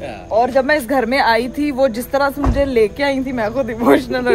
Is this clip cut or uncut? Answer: uncut